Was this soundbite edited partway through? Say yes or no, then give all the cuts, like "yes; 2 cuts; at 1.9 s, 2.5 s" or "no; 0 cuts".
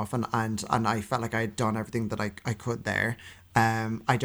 no; 0 cuts